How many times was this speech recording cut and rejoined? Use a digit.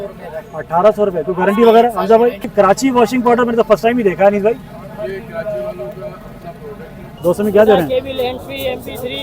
2